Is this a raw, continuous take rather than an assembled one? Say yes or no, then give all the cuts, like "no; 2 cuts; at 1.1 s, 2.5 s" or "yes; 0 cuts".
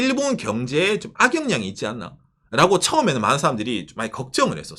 yes; 0 cuts